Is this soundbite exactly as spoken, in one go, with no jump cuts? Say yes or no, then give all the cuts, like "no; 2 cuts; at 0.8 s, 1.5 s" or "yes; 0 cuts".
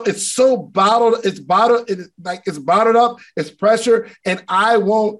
yes; 0 cuts